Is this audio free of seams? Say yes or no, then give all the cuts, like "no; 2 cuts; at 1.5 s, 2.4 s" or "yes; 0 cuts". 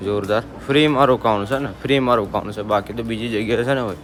yes; 0 cuts